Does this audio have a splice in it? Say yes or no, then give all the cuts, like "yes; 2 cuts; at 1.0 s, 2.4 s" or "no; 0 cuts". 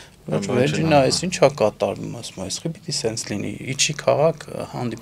no; 0 cuts